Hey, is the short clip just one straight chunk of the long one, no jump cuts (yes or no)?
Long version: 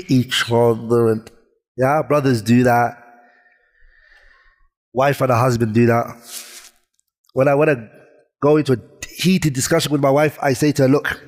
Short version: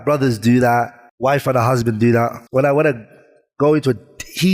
no